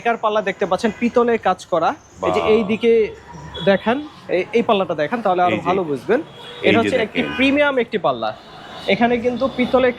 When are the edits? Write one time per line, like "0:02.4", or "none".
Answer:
none